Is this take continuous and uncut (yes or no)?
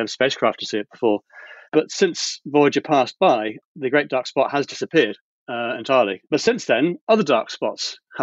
no